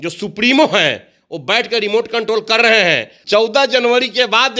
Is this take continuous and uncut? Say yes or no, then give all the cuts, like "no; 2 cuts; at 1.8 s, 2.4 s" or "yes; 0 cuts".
no; 1 cut; at 3.1 s